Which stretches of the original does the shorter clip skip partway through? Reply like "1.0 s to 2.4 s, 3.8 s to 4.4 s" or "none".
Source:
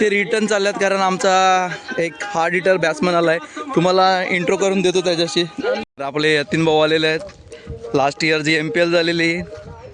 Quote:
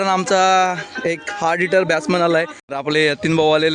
3.6 s to 5.9 s